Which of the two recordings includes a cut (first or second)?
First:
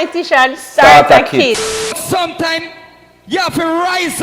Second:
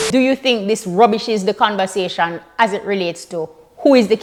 first